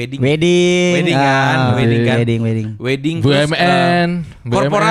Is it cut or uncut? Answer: uncut